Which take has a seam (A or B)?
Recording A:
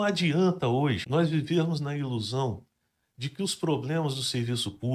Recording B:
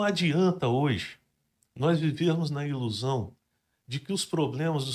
A